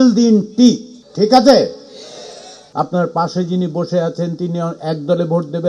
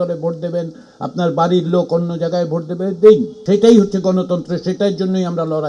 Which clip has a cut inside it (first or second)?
first